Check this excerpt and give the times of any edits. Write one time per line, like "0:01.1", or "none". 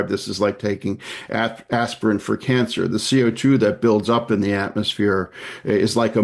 none

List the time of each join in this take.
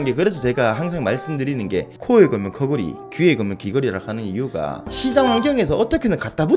0:01.9
0:04.9

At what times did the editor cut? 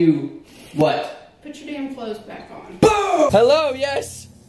0:03.3

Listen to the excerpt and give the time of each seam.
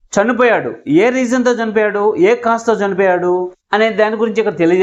none

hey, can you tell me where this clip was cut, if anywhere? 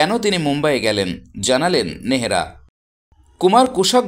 0:02.6

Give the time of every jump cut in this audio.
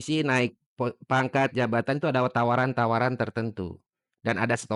none

